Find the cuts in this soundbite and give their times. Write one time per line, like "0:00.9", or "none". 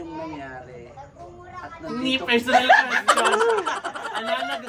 none